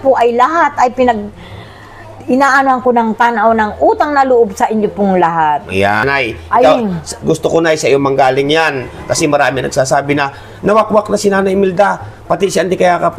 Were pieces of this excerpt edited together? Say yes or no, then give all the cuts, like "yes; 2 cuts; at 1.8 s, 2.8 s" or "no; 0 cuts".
yes; 1 cut; at 6.0 s